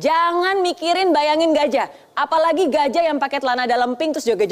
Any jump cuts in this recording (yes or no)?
no